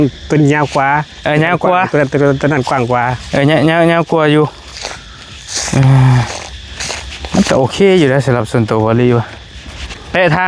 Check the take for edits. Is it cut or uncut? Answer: uncut